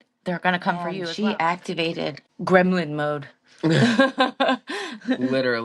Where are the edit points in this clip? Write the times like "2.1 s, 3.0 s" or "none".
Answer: 1.0 s, 2.3 s